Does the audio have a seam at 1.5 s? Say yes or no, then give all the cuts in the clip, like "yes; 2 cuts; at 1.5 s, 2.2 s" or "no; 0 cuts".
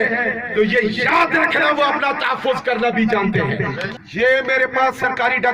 no; 1 cut; at 3.9 s